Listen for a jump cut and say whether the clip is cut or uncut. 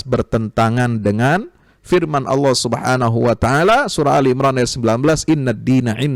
uncut